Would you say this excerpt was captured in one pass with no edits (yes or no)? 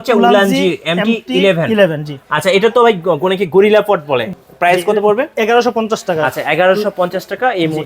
no